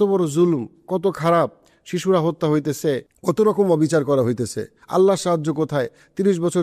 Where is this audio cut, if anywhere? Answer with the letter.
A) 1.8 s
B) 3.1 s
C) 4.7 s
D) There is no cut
B